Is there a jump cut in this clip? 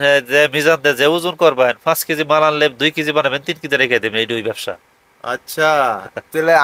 no; 0 cuts

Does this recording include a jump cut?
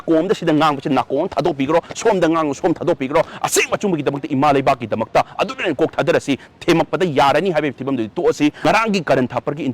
yes; 1 cut; at 8.6 s

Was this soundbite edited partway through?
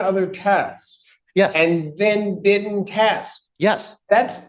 no; 0 cuts

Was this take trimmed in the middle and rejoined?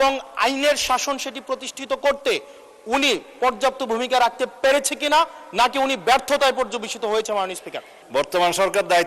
yes; 1 cut; at 7.9 s

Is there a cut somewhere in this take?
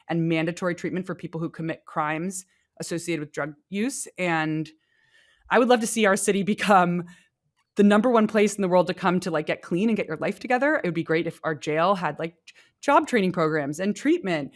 no; 0 cuts

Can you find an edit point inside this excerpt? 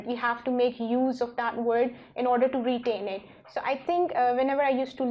no; 0 cuts

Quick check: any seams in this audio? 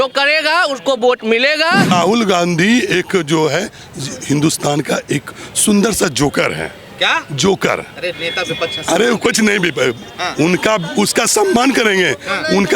yes; 1 cut; at 1.9 s

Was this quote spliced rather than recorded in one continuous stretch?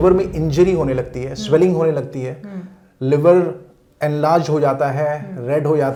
no; 0 cuts

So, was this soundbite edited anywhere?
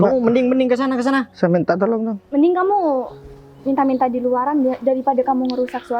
no; 0 cuts

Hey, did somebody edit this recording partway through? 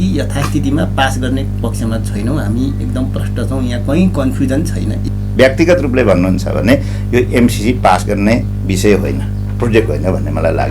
yes; 1 cut; at 4.9 s

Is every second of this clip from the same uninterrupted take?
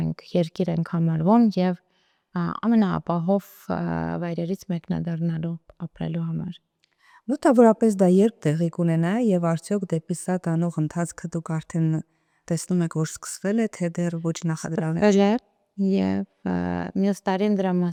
yes; 0 cuts

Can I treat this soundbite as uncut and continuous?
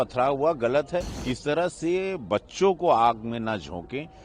no; 1 cut; at 1.2 s

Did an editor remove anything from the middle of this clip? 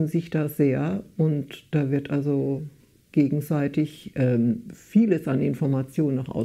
no; 0 cuts

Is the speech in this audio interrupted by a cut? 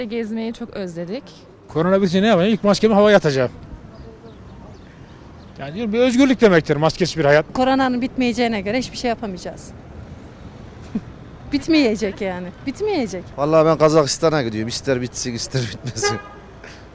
yes; 3 cuts; at 1.5 s, 7.5 s, 13.3 s

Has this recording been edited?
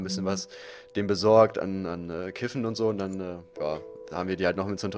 no; 0 cuts

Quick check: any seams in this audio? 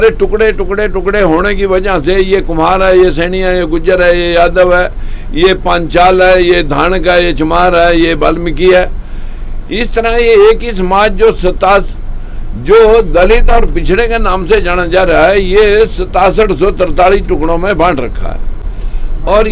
no; 0 cuts

